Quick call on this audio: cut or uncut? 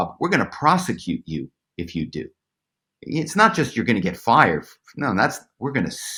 uncut